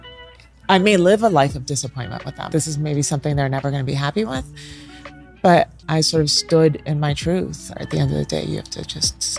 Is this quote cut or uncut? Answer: cut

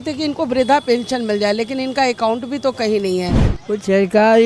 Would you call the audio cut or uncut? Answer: cut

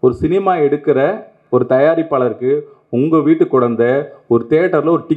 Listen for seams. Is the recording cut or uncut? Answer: cut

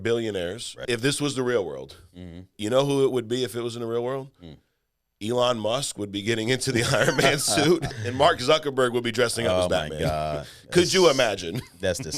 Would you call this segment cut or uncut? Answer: cut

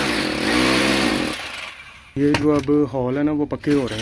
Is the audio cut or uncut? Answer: cut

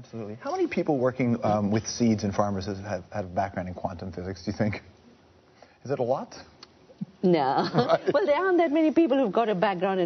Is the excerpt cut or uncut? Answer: uncut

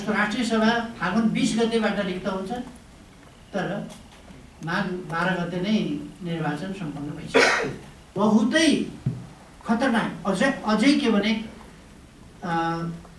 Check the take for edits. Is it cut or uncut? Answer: cut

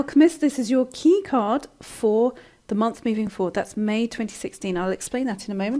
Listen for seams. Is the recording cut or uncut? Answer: uncut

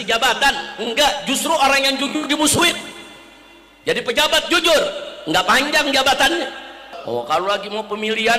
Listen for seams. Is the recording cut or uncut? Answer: cut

